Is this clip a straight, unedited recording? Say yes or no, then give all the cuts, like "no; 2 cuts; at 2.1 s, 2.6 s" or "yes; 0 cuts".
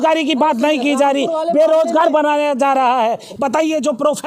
no; 1 cut; at 3.3 s